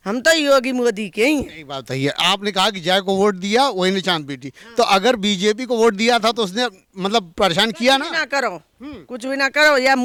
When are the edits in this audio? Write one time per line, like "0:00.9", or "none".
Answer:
none

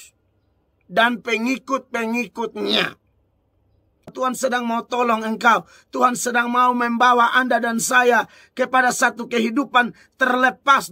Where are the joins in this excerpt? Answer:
0:04.1

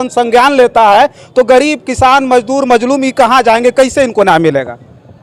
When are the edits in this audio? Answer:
none

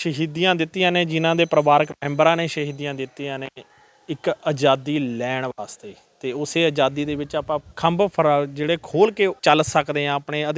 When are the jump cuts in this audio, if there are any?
0:07.7
0:09.4

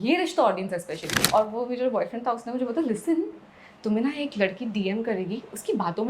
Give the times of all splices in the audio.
0:01.1

